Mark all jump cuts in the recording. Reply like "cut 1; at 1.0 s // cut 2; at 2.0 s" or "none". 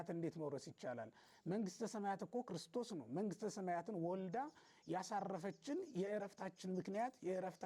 none